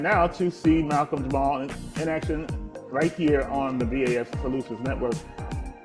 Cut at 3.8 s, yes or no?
no